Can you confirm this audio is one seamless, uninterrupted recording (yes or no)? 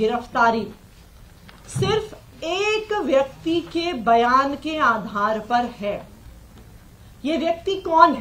yes